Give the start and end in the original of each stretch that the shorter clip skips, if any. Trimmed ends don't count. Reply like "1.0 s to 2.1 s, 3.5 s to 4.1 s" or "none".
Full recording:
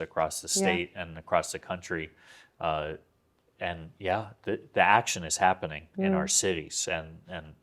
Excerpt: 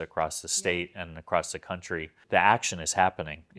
2.2 s to 4.7 s